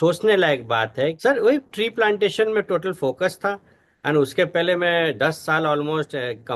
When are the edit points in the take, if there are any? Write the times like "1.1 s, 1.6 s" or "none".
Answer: 1.2 s